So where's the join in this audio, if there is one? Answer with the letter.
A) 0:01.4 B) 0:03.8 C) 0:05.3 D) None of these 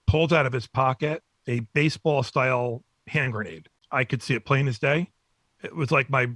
B